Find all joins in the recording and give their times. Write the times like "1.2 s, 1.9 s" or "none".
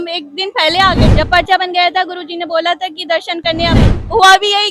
1.1 s, 3.8 s